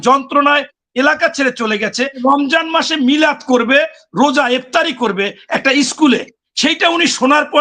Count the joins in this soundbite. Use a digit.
1